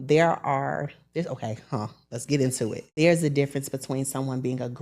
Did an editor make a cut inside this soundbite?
yes; 1 cut; at 2.8 s

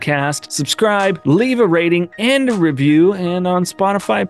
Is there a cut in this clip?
yes; 1 cut; at 1.0 s

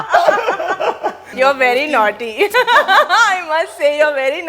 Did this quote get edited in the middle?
no; 0 cuts

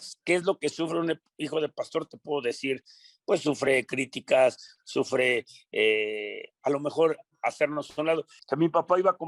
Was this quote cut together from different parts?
yes; 1 cut; at 8.3 s

